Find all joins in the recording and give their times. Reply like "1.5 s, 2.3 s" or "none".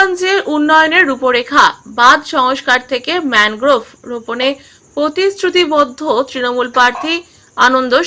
none

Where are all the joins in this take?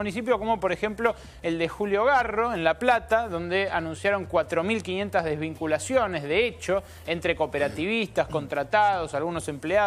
none

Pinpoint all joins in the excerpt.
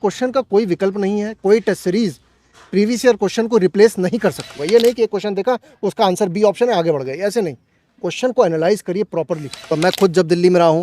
4.6 s, 9.7 s

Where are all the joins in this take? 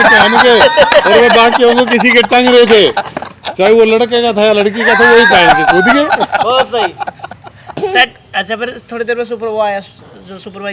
7.8 s

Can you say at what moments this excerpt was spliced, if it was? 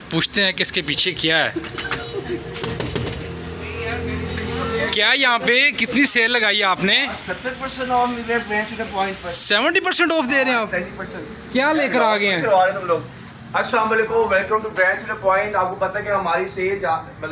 none

